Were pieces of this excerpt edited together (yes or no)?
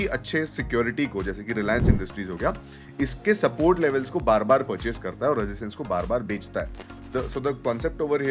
yes